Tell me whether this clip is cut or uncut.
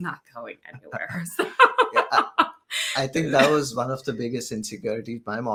uncut